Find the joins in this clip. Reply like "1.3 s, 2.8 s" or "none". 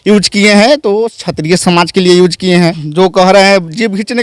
2.8 s